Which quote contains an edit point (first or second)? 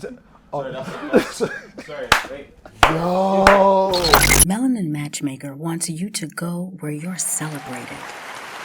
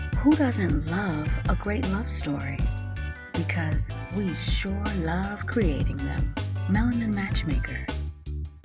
first